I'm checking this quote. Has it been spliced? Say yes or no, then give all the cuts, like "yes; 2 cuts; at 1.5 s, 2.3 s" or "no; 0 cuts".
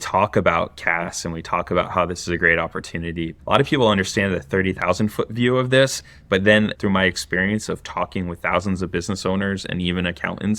yes; 2 cuts; at 3.4 s, 6.7 s